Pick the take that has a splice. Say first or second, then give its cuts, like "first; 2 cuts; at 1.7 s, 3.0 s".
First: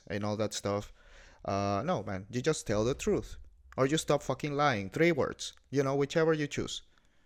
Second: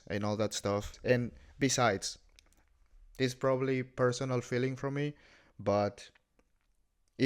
second; 1 cut; at 0.9 s